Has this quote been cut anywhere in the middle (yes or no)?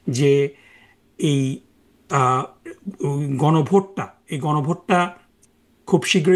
no